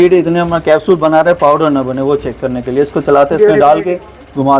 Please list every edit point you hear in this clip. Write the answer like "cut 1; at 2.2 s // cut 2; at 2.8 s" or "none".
none

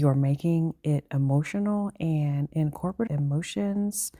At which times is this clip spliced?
cut 1; at 3.1 s

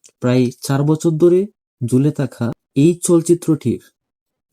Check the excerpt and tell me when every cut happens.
cut 1; at 2.6 s

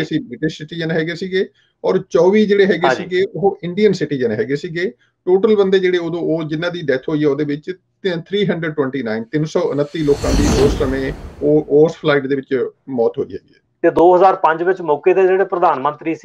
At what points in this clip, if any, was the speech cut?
cut 1; at 14.0 s

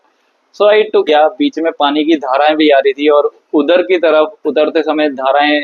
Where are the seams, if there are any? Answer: cut 1; at 1.1 s

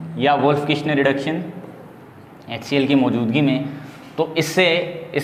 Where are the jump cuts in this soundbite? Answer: none

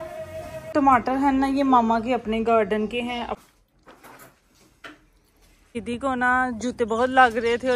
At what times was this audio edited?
cut 1; at 0.7 s // cut 2; at 3.4 s // cut 3; at 5.8 s

